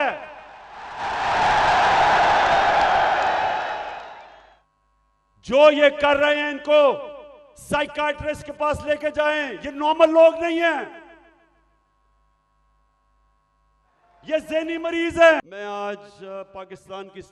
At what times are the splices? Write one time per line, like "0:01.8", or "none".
0:15.4